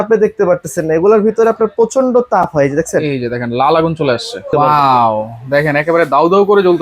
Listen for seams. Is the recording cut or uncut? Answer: cut